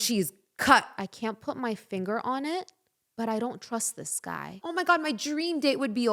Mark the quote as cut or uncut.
cut